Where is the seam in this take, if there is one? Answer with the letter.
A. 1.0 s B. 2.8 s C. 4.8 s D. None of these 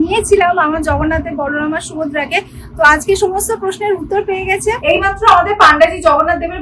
C